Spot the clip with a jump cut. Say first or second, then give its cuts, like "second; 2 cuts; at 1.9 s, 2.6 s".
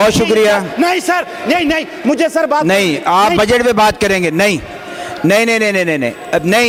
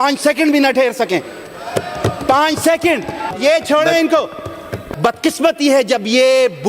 second; 2 cuts; at 3.4 s, 4.8 s